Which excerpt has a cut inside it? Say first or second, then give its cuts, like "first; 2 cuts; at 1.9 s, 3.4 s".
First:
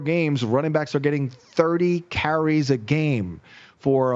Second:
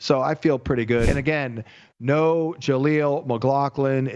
second; 1 cut; at 1.1 s